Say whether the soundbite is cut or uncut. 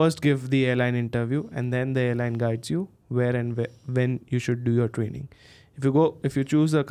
uncut